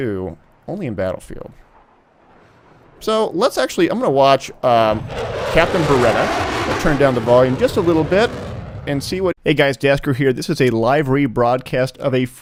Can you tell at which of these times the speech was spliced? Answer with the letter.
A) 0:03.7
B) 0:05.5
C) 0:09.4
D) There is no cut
D